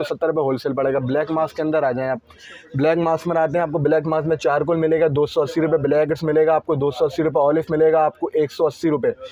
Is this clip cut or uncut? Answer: uncut